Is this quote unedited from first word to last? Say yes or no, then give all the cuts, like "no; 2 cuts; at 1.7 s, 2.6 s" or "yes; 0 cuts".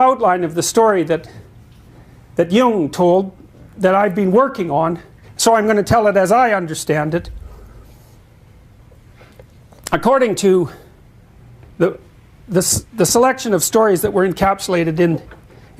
no; 1 cut; at 4.5 s